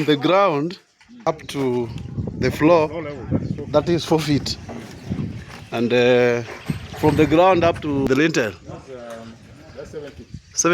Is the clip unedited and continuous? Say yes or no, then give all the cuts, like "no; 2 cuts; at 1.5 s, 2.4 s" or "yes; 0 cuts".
no; 2 cuts; at 1.3 s, 8.1 s